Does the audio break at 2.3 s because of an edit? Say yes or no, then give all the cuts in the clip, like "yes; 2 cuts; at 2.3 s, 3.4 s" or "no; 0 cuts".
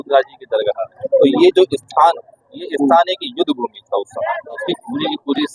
no; 2 cuts; at 0.9 s, 4.7 s